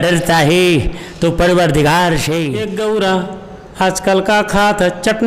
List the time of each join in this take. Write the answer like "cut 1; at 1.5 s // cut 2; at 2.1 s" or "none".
cut 1; at 2.7 s

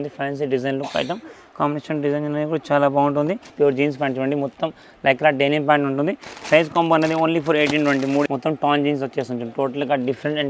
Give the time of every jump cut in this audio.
cut 1; at 3.5 s // cut 2; at 8.3 s

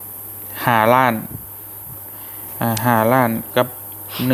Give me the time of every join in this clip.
none

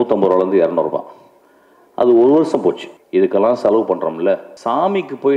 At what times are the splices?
cut 1; at 2.9 s // cut 2; at 4.5 s

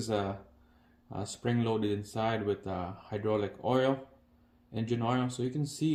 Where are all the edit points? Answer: none

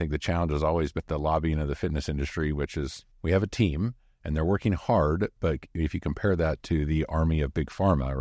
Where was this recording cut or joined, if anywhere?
cut 1; at 1.0 s // cut 2; at 3.1 s

